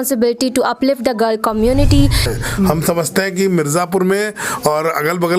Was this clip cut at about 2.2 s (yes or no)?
yes